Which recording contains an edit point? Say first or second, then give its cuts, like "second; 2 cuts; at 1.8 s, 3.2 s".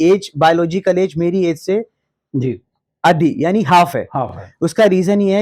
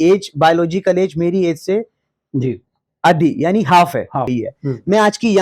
second; 1 cut; at 4.3 s